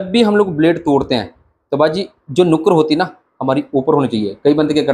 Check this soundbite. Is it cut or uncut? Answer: uncut